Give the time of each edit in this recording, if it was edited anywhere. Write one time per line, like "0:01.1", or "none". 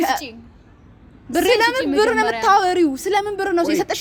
none